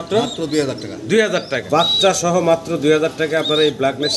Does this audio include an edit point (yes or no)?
yes